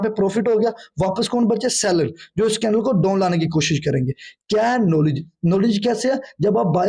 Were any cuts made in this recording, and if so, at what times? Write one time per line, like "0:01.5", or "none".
none